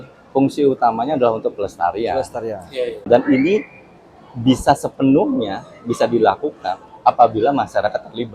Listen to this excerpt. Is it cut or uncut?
cut